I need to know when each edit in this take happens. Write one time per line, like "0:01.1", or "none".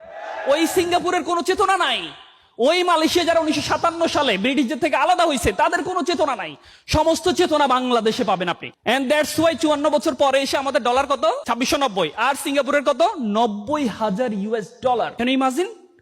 0:08.7
0:11.4
0:15.1